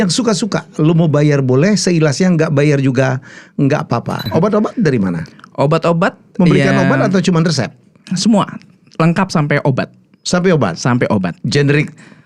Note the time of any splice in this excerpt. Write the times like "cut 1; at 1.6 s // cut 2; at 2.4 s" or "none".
cut 1; at 4.3 s